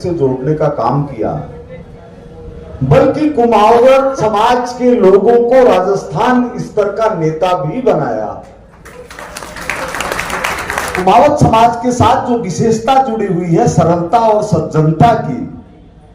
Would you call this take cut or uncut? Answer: cut